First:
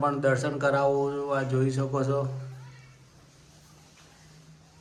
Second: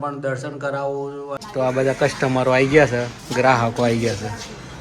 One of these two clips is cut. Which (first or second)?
second